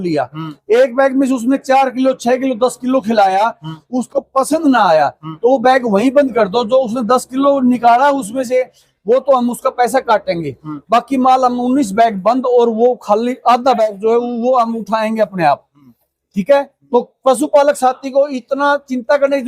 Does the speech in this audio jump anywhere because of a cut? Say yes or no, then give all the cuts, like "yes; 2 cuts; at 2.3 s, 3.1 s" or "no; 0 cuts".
no; 0 cuts